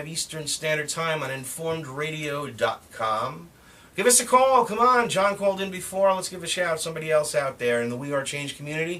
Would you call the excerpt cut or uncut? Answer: cut